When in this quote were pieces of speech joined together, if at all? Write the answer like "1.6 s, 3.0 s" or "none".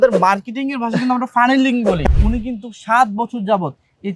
2.0 s